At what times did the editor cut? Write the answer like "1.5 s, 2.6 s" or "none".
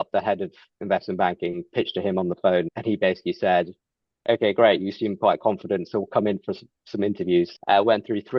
2.7 s, 7.6 s